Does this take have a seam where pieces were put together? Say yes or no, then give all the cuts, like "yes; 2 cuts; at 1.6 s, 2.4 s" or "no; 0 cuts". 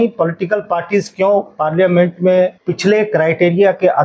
yes; 1 cut; at 2.6 s